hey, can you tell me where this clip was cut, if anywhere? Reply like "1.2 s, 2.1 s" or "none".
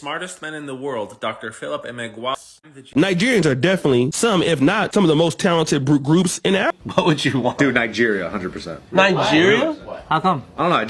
2.3 s, 6.7 s